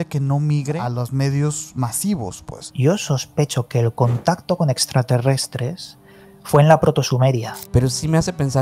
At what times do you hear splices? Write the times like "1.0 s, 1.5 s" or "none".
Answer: 0.8 s, 2.7 s, 7.5 s